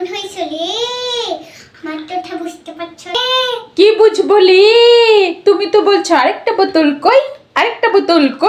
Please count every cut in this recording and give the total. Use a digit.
0